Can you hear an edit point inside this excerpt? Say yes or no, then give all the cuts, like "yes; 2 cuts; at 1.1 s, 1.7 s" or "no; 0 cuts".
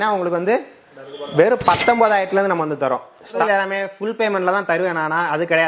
yes; 1 cut; at 3.4 s